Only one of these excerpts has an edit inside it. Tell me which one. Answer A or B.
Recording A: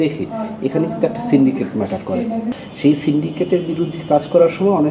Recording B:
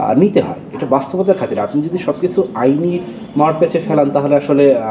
A